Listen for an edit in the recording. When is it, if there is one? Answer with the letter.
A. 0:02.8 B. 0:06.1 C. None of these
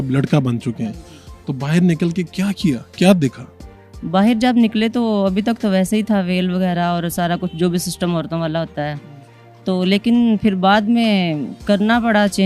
C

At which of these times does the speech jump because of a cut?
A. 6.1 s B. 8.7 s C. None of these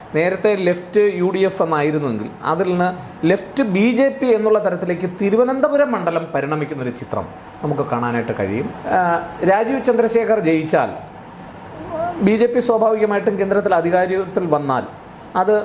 B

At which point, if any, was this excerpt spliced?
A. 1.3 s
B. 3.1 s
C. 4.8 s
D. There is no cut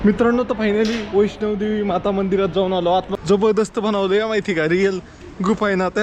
B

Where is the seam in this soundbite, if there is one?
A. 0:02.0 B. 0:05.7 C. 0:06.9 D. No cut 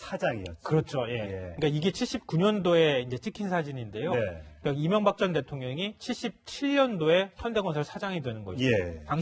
B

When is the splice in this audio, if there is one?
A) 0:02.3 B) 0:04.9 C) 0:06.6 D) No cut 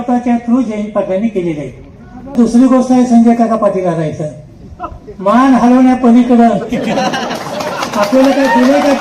A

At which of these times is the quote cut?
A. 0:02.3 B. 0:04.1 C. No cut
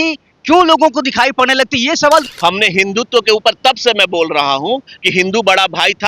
A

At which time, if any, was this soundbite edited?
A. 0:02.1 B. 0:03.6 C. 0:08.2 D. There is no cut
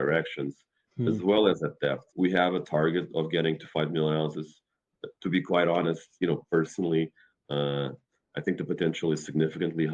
A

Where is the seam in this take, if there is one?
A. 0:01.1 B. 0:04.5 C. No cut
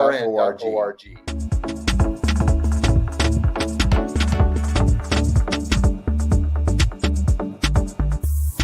A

